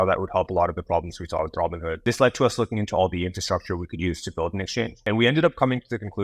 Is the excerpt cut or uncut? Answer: cut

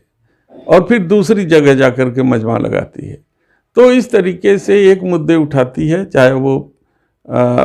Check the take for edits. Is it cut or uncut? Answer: uncut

